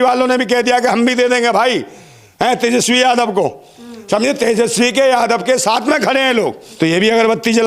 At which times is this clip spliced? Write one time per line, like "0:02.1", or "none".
0:06.6